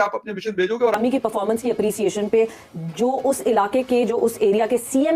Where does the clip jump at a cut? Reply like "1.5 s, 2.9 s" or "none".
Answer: 0.9 s